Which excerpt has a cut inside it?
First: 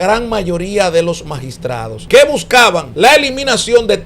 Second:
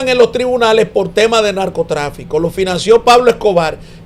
first; 2 cuts; at 1.9 s, 2.9 s

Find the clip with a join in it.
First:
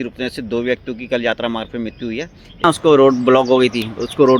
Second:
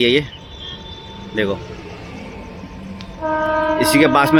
first; 1 cut; at 2.6 s

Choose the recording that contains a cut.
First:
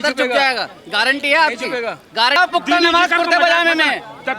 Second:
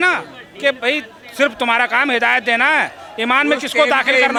first; 1 cut; at 2.4 s

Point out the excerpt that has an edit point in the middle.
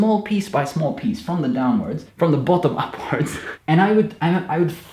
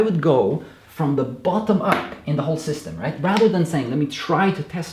first; 2 cuts; at 2.0 s, 3.5 s

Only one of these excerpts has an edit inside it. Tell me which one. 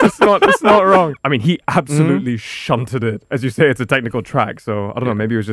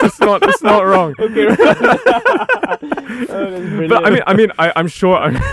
first; 2 cuts; at 1.1 s, 3.2 s

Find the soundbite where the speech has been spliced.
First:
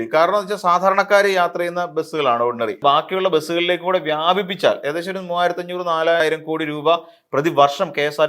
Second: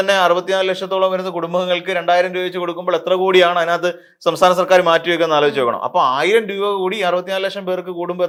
first; 2 cuts; at 2.8 s, 6.2 s

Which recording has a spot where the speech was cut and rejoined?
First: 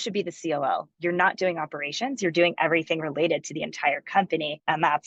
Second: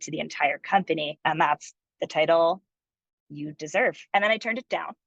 second; 1 cut; at 4.0 s

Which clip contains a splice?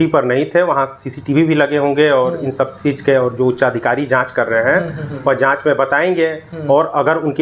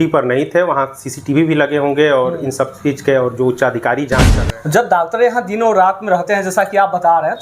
second; 1 cut; at 4.3 s

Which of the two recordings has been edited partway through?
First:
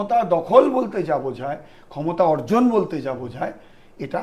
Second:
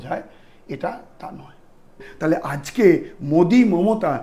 second; 1 cut; at 2.1 s

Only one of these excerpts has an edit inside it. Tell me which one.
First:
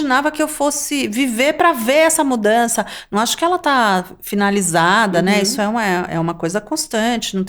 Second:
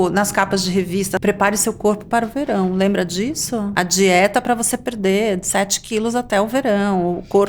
second; 2 cuts; at 1.2 s, 3.7 s

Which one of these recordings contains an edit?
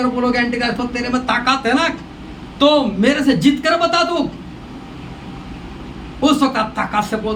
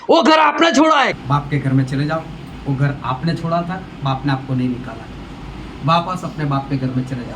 second; 1 cut; at 1.2 s

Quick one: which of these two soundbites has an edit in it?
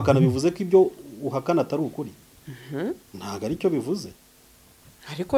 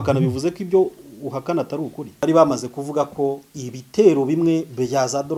second; 1 cut; at 2.1 s

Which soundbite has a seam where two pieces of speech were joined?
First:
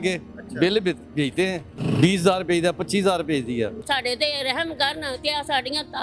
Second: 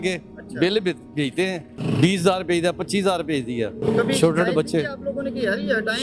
first; 1 cut; at 3.8 s

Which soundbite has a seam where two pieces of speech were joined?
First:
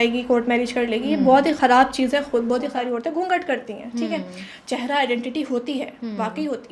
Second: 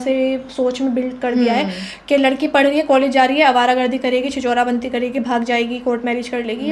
first; 1 cut; at 2.7 s

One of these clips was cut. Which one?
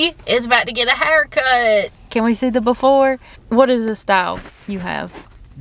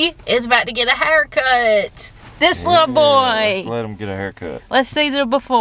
first; 2 cuts; at 2.0 s, 3.3 s

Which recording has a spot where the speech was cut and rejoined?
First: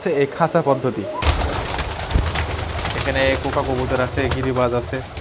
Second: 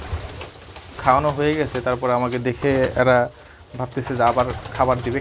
first; 1 cut; at 1.3 s

